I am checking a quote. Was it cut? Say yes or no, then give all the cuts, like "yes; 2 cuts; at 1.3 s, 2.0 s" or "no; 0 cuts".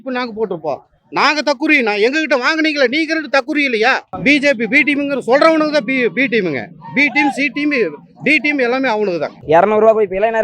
yes; 2 cuts; at 4.1 s, 9.4 s